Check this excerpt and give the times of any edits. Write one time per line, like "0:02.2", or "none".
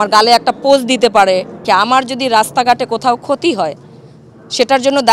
0:01.6